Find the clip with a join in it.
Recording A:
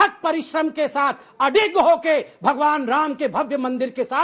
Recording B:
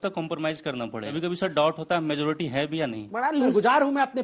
B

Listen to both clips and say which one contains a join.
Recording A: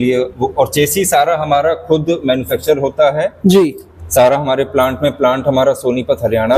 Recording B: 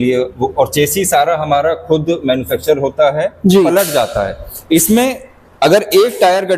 B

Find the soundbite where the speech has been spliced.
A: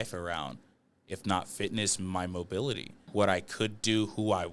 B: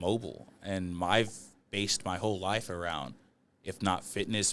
A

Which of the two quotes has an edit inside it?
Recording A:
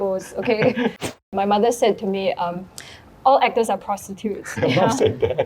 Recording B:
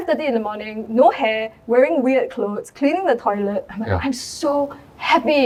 A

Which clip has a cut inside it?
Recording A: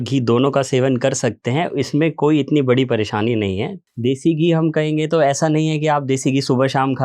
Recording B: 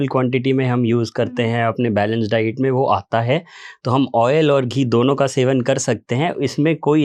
A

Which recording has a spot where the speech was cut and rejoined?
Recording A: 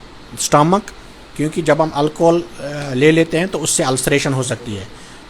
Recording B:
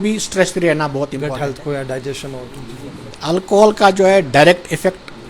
B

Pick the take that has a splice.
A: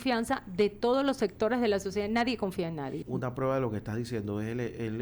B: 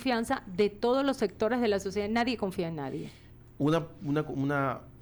A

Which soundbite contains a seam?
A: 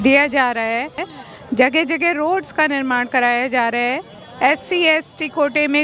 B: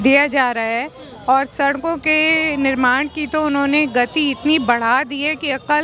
A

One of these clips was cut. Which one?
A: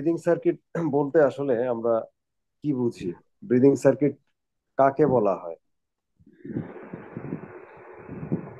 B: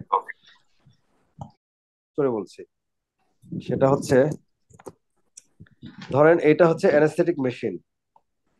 B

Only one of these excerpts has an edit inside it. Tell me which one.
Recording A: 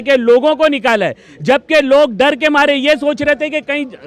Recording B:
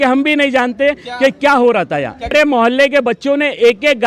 B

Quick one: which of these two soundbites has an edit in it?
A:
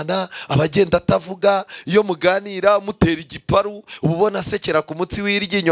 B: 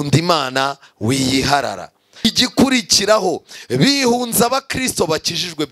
B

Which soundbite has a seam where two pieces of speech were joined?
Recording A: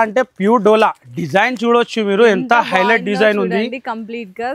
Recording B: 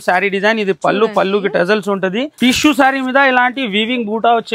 B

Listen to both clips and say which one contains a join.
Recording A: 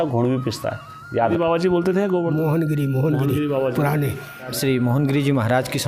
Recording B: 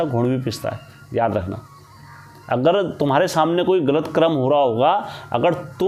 A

